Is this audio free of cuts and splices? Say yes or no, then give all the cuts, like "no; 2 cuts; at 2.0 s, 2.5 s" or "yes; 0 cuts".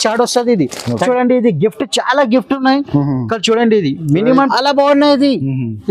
no; 2 cuts; at 1.0 s, 4.5 s